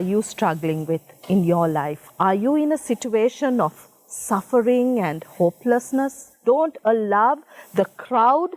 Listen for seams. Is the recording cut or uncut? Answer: cut